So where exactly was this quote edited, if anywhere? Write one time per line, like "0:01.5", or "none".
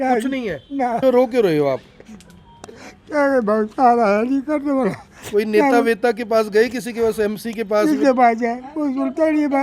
0:01.0